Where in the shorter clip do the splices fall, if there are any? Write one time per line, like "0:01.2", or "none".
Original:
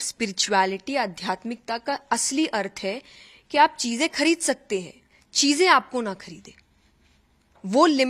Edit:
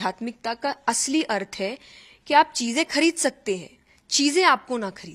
none